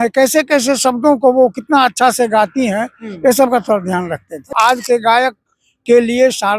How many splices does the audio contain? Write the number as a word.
one